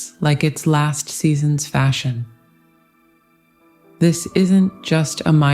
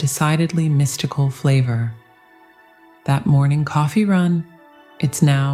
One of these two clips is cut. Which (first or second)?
first